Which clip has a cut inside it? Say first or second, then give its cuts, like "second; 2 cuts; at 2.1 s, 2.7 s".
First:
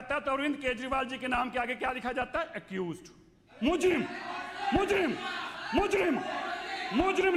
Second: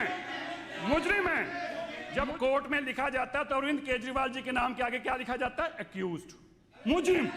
second; 1 cut; at 2.0 s